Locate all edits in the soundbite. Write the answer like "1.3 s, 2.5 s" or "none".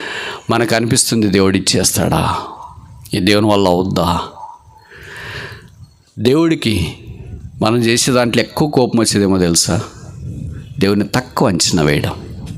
none

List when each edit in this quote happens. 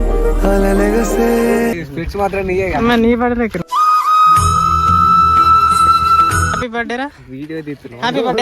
1.7 s, 6.3 s

